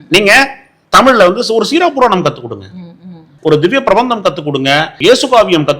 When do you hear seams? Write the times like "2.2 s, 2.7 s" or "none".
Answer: 3.3 s, 4.9 s